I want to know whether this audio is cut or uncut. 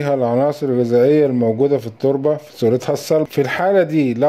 cut